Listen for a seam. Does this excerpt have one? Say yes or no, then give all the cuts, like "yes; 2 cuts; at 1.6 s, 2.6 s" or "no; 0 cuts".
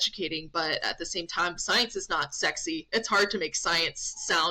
no; 0 cuts